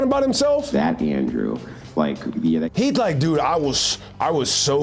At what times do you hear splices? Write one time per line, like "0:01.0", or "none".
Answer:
none

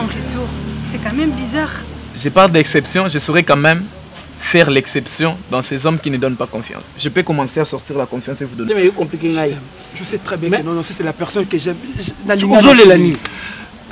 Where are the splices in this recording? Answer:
0:08.7

